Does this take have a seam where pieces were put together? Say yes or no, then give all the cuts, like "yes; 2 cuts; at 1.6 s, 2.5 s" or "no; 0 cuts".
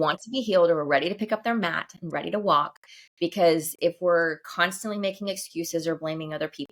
no; 0 cuts